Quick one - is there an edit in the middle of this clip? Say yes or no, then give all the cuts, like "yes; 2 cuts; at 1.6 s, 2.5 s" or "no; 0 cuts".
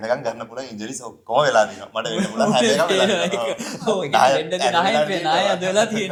no; 0 cuts